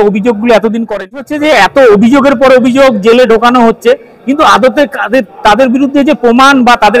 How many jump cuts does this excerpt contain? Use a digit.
1